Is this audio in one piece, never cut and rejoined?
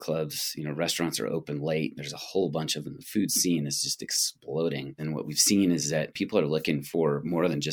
no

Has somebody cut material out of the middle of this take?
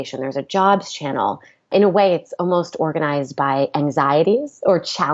yes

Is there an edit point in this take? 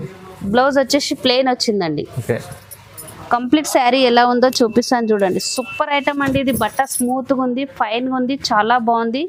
no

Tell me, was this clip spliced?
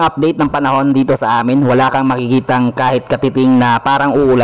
no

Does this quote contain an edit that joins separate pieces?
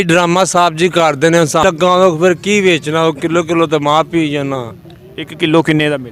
yes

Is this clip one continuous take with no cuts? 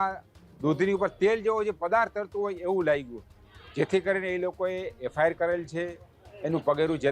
yes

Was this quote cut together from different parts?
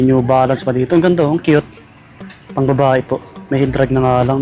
no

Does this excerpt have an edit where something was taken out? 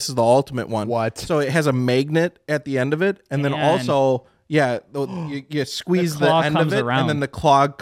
no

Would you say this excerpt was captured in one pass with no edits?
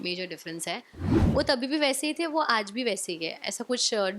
no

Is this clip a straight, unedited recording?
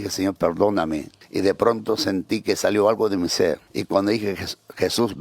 no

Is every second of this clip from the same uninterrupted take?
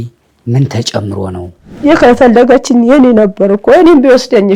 no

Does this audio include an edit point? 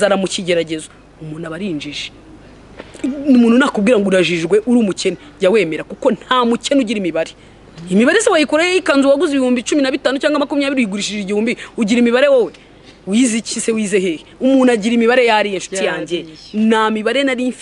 no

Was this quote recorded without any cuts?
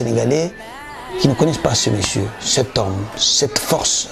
yes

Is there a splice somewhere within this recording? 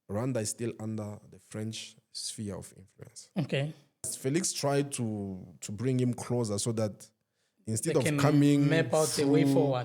yes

